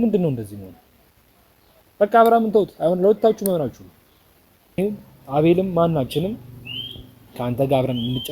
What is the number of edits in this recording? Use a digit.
1